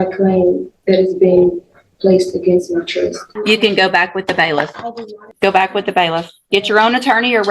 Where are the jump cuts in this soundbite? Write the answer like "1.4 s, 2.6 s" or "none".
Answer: 3.3 s, 5.3 s